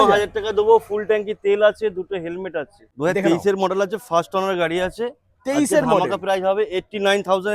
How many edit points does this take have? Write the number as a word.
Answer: one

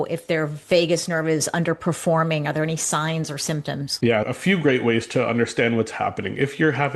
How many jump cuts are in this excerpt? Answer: one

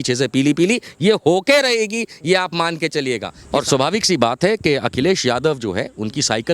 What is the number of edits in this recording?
one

